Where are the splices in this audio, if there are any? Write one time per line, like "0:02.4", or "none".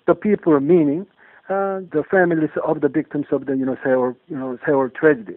0:01.8